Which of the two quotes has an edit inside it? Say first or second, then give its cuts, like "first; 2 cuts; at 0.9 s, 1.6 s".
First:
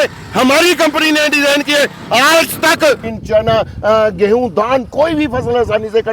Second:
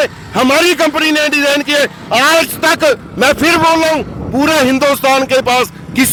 first; 1 cut; at 3.1 s